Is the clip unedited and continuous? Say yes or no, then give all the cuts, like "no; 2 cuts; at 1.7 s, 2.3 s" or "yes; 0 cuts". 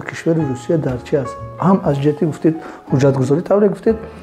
yes; 0 cuts